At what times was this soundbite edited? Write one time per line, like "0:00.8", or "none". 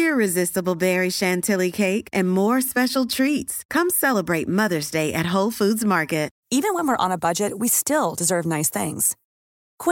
none